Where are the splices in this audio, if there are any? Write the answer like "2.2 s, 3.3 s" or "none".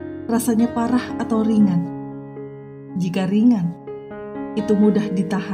none